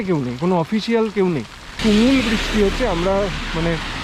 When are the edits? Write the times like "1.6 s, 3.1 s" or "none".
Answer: 1.7 s